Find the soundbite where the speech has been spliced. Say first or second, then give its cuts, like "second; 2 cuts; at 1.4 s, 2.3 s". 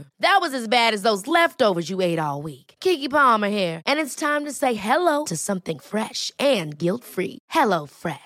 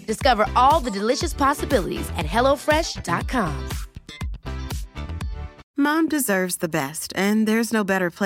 second; 1 cut; at 5.5 s